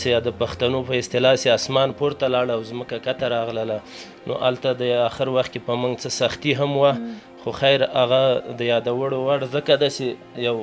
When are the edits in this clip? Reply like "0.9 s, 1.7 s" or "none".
none